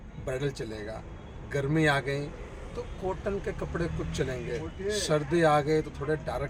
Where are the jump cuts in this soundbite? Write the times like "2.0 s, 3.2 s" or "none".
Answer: none